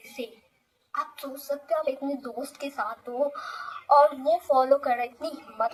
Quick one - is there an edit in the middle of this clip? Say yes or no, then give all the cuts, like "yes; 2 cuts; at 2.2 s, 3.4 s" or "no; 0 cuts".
no; 0 cuts